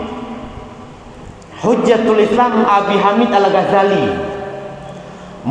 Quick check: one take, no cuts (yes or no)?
yes